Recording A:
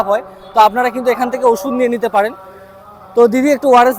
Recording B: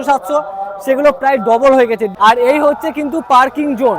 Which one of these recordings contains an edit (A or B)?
B